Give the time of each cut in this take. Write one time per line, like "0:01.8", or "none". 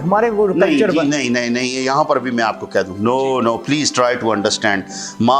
none